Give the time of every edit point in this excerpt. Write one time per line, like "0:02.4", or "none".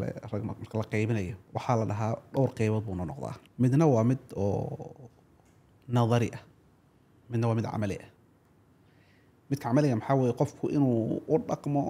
0:01.4
0:03.4